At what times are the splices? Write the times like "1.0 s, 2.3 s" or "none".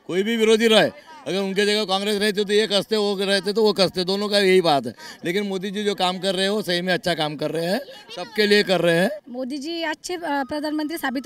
9.3 s